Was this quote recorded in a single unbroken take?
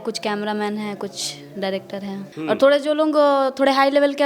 no; 1 cut; at 2.3 s

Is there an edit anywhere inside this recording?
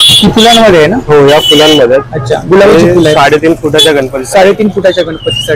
no; 0 cuts

